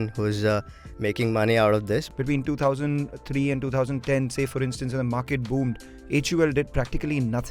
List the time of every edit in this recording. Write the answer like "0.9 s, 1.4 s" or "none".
2.1 s